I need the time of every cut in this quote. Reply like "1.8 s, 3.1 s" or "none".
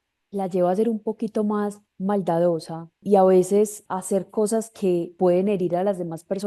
3.0 s, 3.9 s, 5.1 s